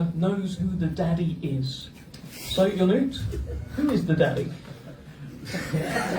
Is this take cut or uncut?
uncut